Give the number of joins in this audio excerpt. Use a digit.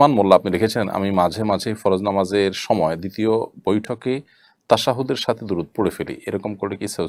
0